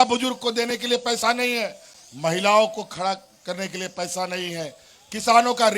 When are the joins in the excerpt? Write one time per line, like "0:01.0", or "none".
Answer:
none